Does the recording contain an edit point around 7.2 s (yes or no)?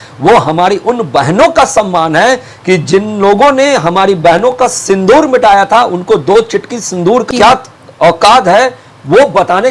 yes